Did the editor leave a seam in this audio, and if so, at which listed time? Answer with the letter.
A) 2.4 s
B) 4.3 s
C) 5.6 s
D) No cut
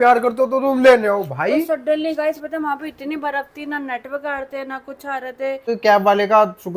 C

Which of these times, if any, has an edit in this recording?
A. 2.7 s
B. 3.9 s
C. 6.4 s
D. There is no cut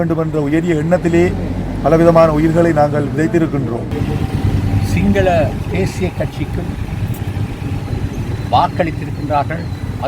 B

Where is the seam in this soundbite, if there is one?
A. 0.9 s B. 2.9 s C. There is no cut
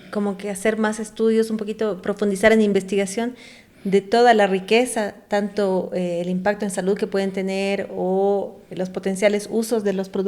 C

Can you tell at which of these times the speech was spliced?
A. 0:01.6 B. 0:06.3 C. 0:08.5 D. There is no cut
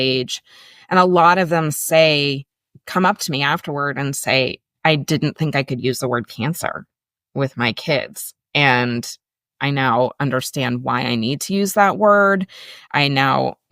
D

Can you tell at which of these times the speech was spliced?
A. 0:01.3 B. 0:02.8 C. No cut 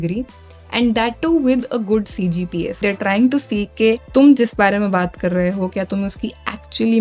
B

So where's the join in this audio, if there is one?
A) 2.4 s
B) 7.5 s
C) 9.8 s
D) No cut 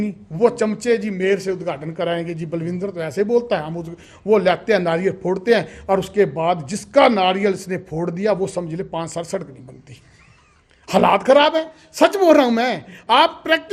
D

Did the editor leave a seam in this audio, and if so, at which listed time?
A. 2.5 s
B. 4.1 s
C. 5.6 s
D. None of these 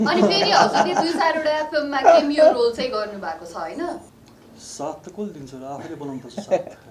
B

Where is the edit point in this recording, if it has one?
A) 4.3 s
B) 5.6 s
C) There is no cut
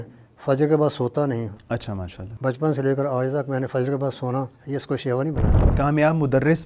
B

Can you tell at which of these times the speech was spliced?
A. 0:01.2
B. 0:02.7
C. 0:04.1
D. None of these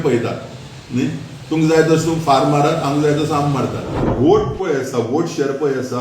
C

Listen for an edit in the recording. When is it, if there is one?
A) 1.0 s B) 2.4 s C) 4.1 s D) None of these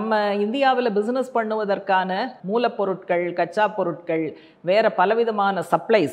B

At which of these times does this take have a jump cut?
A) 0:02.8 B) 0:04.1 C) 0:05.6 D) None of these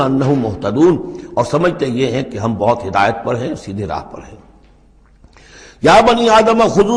D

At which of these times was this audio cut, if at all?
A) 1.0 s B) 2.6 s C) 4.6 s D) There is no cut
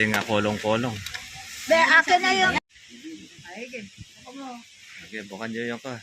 B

